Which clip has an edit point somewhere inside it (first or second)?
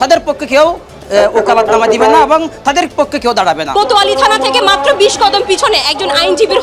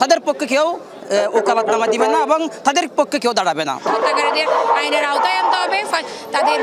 first